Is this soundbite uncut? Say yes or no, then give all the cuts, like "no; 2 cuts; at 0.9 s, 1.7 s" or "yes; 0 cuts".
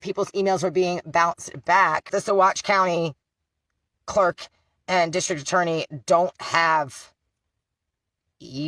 no; 1 cut; at 2.1 s